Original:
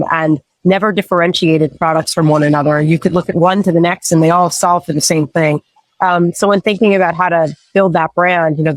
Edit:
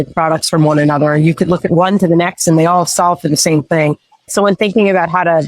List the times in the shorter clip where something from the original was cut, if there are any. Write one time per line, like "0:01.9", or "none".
0:04.3